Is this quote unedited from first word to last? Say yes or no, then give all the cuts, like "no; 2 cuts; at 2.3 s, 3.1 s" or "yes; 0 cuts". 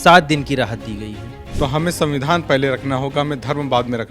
no; 1 cut; at 1.4 s